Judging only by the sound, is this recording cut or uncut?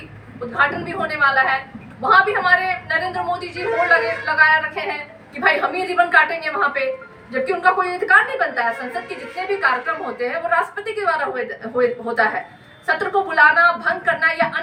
uncut